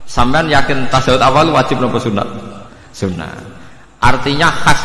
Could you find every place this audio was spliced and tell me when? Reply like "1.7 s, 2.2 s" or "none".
none